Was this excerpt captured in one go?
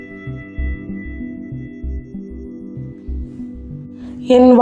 yes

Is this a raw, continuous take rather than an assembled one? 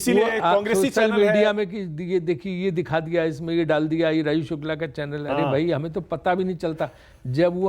yes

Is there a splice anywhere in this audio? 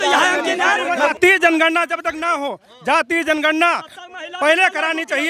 yes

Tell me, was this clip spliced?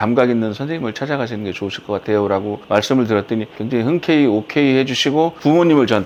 no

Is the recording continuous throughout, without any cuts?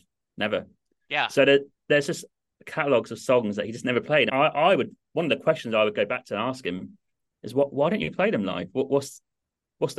yes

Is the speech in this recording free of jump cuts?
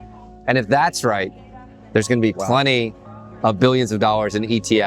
yes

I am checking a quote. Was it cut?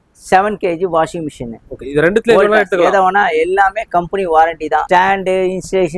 yes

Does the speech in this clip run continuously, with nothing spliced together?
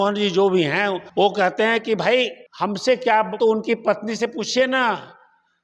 no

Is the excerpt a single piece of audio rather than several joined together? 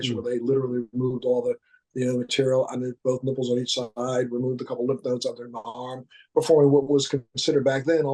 yes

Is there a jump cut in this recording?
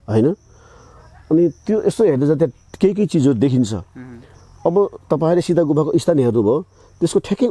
no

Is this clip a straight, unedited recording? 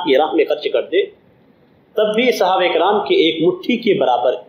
yes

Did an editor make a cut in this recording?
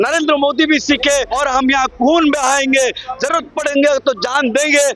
yes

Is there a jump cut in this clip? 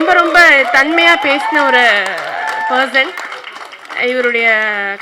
no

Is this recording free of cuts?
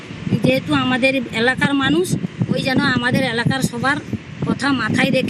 yes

